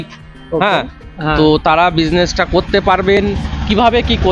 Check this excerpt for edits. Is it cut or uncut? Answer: uncut